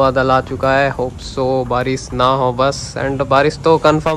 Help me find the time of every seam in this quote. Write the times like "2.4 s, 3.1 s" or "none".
none